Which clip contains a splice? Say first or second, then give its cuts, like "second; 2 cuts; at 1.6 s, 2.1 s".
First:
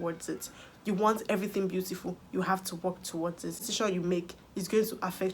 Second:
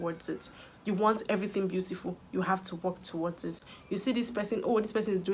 first; 1 cut; at 3.7 s